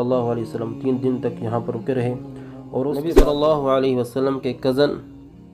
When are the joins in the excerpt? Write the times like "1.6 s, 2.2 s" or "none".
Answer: 3.1 s